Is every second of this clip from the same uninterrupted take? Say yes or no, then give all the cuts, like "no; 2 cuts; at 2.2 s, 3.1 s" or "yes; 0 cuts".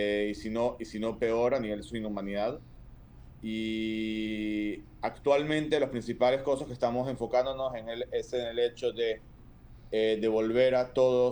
yes; 0 cuts